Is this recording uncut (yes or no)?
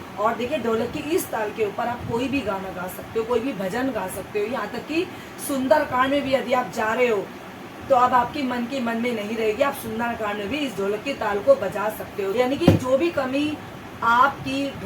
no